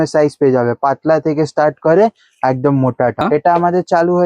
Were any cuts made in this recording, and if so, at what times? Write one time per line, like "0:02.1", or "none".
0:03.2